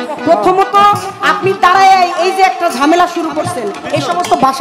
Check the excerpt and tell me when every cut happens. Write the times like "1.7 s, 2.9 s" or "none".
none